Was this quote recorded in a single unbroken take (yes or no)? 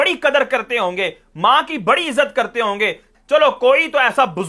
no